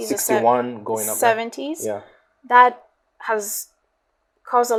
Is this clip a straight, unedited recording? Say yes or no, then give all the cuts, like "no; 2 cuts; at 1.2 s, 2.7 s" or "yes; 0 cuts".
yes; 0 cuts